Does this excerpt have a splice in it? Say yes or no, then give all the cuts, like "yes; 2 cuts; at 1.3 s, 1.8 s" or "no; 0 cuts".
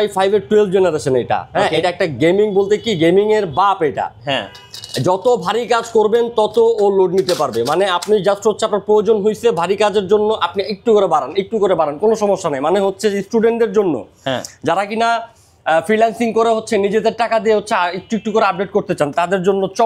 no; 0 cuts